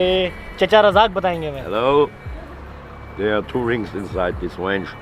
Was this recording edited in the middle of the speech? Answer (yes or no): no